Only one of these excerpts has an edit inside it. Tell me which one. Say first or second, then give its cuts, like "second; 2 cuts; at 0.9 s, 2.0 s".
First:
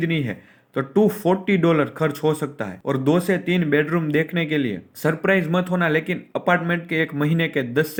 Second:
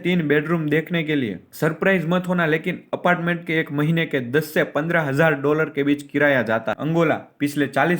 second; 1 cut; at 6.8 s